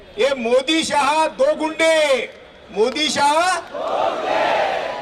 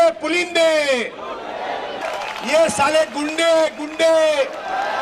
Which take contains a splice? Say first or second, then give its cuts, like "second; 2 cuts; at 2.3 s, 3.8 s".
second; 1 cut; at 2.0 s